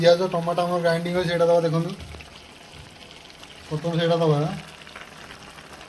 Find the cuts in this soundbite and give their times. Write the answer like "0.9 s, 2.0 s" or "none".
none